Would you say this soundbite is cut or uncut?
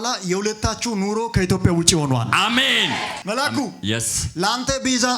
cut